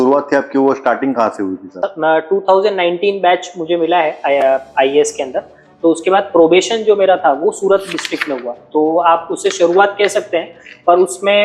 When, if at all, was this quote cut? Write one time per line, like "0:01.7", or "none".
none